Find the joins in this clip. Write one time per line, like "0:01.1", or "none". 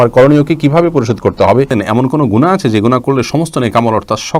0:01.7